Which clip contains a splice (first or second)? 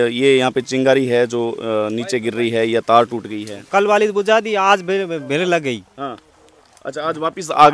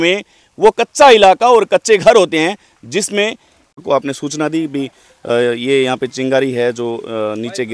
second